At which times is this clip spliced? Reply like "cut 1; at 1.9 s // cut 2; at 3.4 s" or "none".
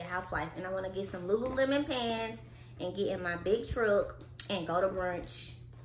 none